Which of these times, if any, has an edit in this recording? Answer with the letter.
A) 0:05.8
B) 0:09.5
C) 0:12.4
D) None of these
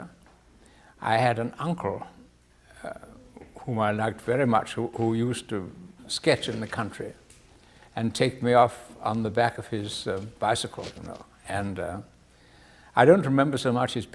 D